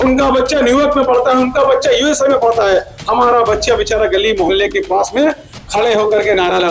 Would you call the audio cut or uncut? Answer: uncut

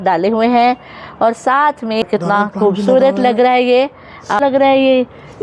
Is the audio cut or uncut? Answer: cut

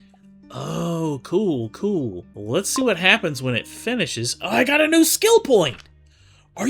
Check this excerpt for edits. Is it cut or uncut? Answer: cut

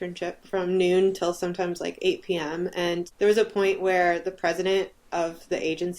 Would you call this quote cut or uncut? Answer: cut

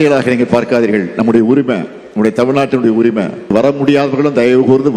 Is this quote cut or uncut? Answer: cut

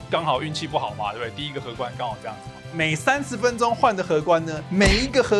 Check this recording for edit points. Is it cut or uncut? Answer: uncut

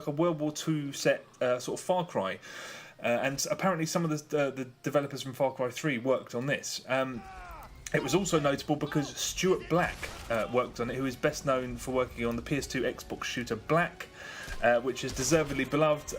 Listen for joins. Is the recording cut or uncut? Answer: cut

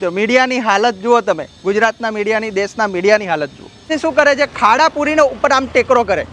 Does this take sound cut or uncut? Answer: cut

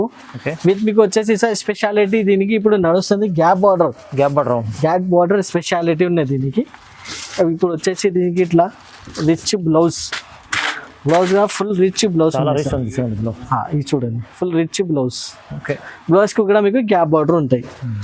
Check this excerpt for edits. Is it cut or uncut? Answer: uncut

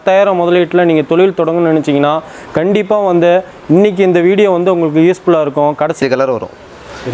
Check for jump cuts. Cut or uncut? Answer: cut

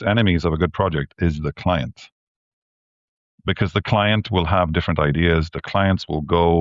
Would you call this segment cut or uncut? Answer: uncut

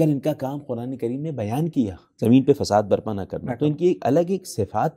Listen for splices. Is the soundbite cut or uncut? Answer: cut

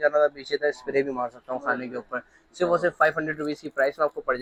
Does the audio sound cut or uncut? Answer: uncut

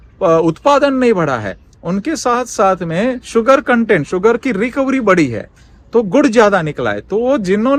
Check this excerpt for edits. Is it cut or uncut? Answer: uncut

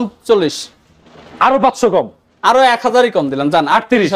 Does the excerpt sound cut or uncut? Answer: uncut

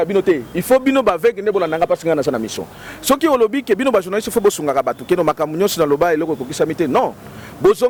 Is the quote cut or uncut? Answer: uncut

